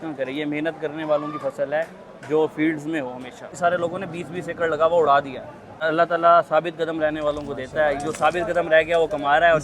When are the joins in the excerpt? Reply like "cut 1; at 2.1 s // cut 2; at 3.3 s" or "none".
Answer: cut 1; at 3.5 s // cut 2; at 5.8 s